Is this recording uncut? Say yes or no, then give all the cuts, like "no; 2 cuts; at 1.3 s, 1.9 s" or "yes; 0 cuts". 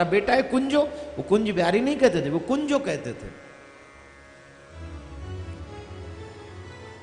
yes; 0 cuts